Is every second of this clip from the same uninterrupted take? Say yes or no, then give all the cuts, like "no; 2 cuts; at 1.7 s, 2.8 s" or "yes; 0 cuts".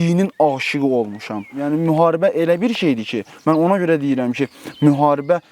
no; 1 cut; at 1.6 s